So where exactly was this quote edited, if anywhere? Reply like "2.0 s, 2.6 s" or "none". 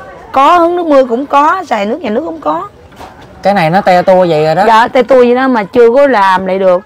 none

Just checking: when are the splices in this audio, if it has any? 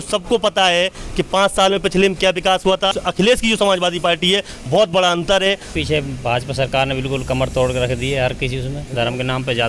3.0 s, 5.8 s, 8.8 s

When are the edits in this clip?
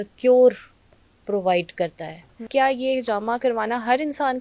2.4 s

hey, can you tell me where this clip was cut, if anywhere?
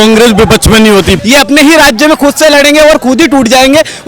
1.2 s

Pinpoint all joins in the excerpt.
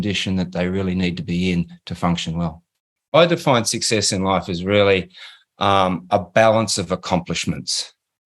3.1 s

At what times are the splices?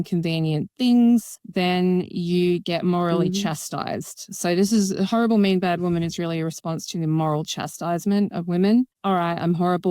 8.9 s

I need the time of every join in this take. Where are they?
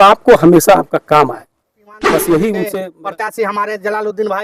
2.8 s

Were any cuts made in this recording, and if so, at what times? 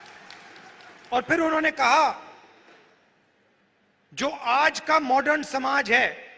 3.6 s

